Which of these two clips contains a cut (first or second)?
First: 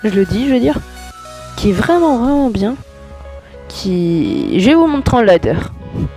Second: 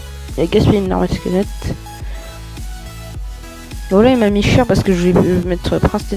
second